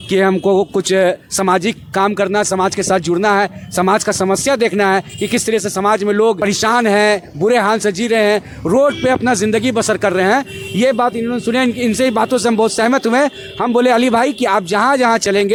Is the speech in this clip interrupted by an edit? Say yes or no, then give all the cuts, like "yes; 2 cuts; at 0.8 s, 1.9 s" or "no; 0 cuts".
no; 0 cuts